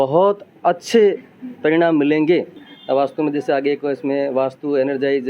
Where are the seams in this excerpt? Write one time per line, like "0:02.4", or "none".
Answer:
0:02.5